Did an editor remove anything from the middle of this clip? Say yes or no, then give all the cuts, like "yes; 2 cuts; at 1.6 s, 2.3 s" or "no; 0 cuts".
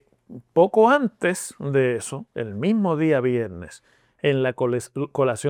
no; 0 cuts